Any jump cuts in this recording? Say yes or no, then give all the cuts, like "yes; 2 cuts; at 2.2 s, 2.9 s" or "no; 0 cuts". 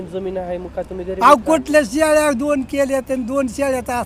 no; 0 cuts